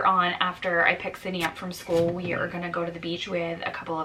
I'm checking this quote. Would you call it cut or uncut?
uncut